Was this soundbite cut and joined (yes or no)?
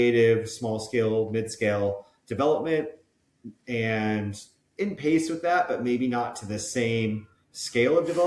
no